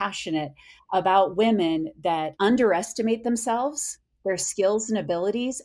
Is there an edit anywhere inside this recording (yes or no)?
yes